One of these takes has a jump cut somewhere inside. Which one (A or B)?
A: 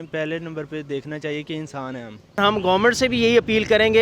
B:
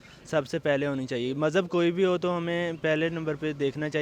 A